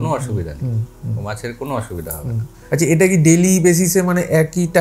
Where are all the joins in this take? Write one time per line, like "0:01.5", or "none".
none